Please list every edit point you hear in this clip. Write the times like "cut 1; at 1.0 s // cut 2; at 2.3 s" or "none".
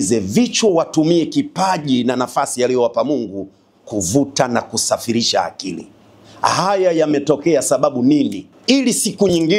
cut 1; at 8.5 s